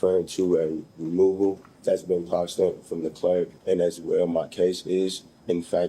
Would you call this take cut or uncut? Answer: cut